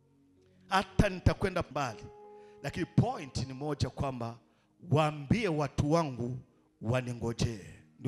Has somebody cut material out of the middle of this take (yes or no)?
yes